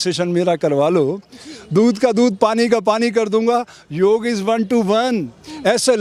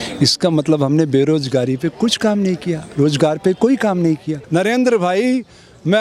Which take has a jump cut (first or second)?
second